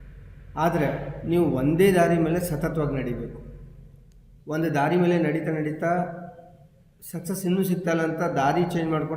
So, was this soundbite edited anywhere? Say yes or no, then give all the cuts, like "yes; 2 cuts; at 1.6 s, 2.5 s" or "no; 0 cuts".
no; 0 cuts